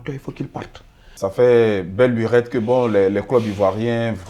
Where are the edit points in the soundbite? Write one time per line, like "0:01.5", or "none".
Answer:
0:01.1